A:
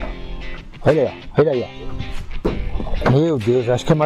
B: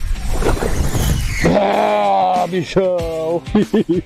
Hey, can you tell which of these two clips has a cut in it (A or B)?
A